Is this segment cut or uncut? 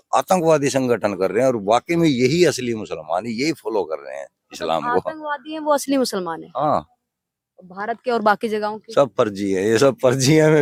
uncut